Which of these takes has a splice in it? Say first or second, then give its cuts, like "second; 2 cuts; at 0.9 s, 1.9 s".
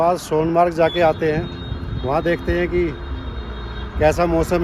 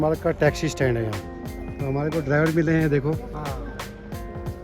second; 1 cut; at 1.4 s